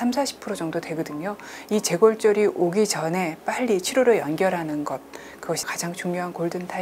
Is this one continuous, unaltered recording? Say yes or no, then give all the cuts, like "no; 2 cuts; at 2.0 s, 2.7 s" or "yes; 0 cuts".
no; 1 cut; at 5.7 s